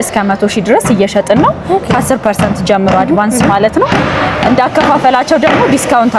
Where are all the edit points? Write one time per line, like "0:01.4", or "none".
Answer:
none

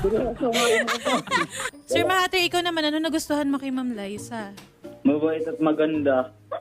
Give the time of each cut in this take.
0:01.7

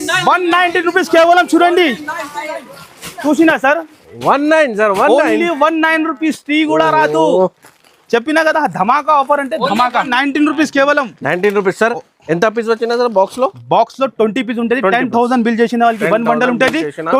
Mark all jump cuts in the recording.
none

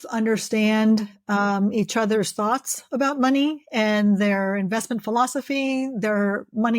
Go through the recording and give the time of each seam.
none

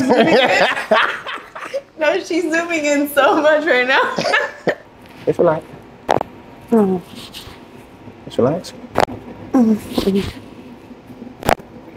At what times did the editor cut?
0:04.8

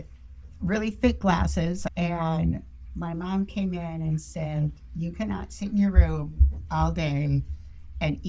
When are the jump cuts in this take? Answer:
0:01.8

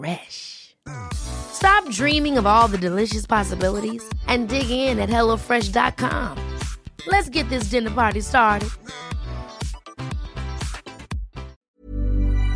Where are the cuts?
0:11.5

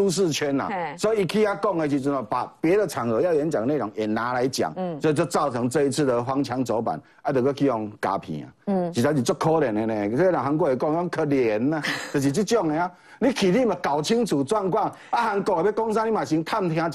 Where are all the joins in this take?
none

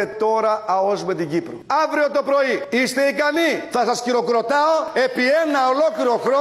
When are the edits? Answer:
none

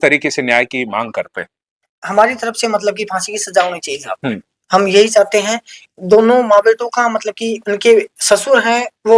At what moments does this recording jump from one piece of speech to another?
none

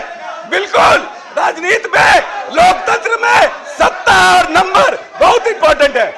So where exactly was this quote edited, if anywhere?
none

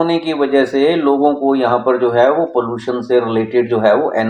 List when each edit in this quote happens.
none

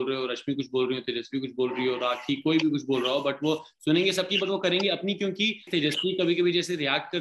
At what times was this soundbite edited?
0:05.7

